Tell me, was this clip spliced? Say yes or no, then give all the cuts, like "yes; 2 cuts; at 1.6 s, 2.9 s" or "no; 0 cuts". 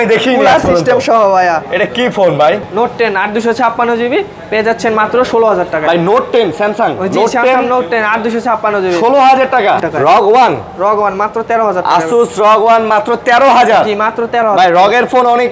yes; 2 cuts; at 2.7 s, 9.8 s